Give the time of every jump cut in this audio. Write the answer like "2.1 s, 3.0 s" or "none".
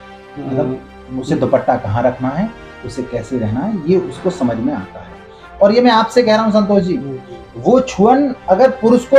none

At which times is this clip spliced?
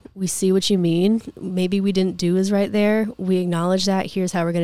none

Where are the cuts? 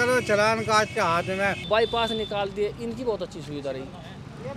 1.6 s

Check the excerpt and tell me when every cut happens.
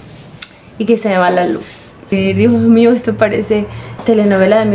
2.1 s, 3.8 s

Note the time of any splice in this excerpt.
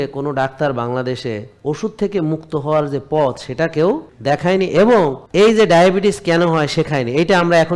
4.1 s, 5.2 s

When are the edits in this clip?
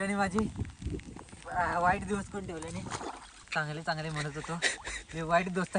3.3 s

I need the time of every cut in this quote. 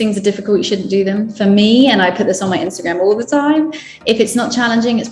none

